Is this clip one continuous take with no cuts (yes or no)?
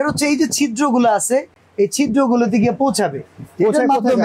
yes